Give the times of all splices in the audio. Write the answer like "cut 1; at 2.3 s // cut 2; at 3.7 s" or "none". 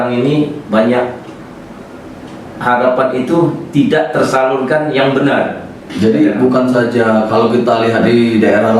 none